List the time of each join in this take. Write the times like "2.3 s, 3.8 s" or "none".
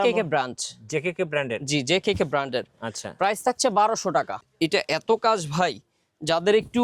4.4 s